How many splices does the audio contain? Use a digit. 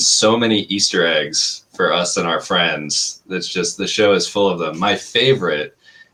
0